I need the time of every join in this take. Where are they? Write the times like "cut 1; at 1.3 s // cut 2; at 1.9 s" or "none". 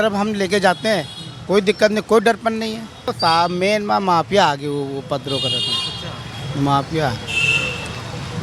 cut 1; at 3.1 s